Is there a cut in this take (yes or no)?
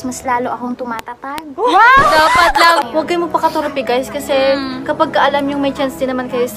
yes